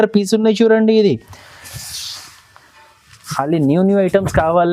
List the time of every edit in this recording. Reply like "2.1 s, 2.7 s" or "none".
3.3 s